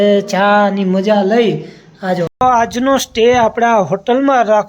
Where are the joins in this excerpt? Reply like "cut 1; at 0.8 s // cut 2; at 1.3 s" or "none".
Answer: cut 1; at 2.3 s